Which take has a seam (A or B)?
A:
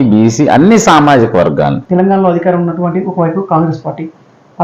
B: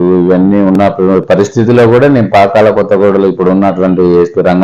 A